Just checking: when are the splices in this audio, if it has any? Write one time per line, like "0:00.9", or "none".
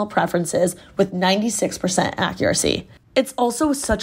0:02.9